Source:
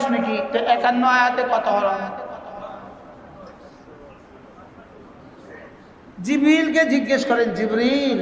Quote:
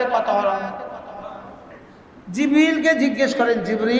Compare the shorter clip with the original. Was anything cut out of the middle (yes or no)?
yes